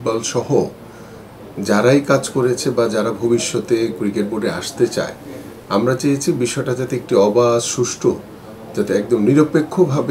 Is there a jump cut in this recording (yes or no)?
no